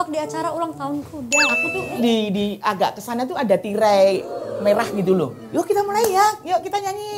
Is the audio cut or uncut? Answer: cut